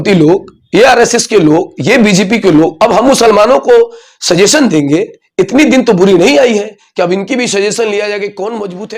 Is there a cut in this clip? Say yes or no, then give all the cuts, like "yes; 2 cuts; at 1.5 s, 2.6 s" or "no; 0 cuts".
no; 0 cuts